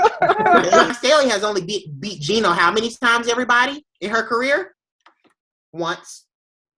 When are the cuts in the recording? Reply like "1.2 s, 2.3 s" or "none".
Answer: 0.9 s